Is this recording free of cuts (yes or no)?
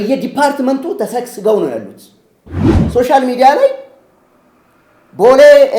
no